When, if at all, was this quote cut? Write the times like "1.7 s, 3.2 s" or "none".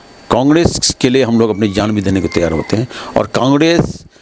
none